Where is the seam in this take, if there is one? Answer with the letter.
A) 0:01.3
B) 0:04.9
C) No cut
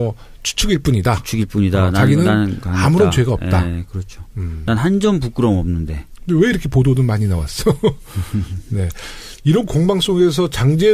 A